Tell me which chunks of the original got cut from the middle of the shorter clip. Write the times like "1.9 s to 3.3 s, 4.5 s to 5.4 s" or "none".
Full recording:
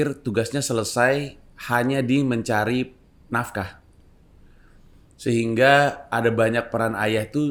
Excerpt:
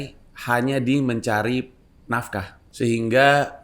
3.8 s to 5.0 s